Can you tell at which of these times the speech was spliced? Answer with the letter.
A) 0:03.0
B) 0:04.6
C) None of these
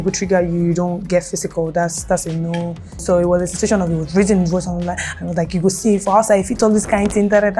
A